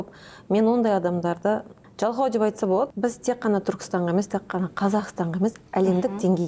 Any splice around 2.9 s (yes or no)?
yes